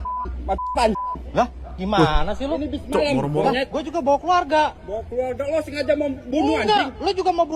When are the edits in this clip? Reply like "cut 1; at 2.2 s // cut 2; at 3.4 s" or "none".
none